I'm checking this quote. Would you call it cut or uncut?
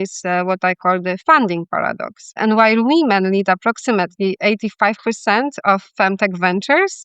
cut